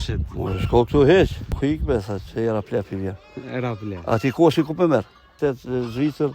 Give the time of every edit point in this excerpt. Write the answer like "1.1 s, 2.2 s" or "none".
1.5 s, 5.3 s